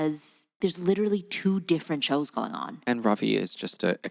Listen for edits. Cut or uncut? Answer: cut